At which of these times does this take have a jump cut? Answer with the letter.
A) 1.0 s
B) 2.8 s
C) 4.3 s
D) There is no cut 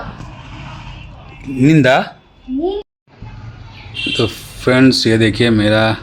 B